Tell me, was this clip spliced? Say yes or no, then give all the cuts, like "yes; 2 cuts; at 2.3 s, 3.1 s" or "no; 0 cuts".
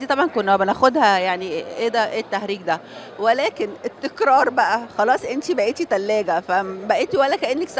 no; 0 cuts